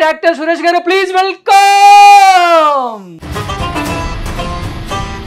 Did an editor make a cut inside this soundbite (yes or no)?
yes